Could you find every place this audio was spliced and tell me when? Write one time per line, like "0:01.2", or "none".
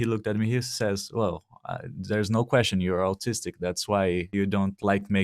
0:04.3